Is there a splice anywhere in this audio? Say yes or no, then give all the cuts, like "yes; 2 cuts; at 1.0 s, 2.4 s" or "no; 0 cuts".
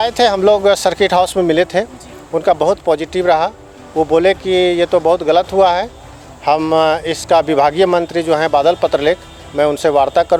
no; 0 cuts